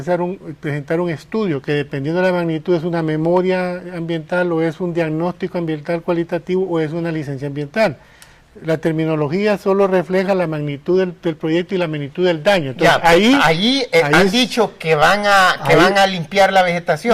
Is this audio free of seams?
no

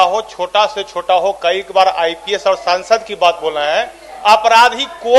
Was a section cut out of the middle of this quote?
no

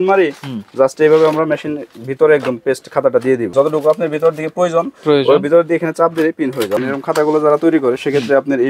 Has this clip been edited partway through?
yes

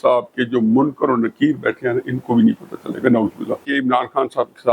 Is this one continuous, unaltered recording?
no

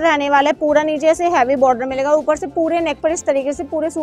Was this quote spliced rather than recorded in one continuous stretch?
no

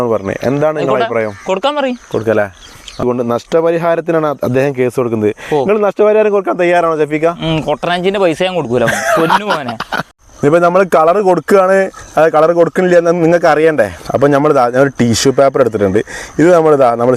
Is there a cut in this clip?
yes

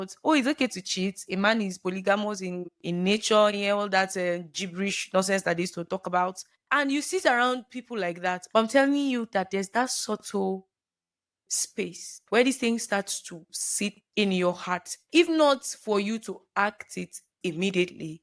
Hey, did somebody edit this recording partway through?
yes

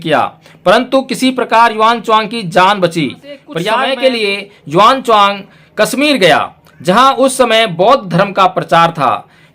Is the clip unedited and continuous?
no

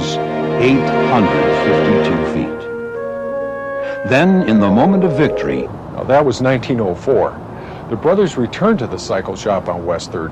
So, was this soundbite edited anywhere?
no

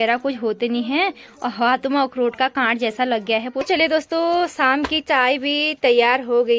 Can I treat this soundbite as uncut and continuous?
no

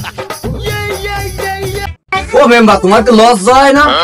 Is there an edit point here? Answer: yes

